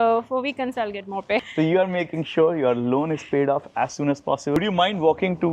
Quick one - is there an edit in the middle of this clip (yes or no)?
yes